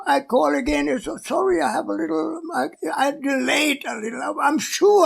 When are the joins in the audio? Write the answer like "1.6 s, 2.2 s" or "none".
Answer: 2.8 s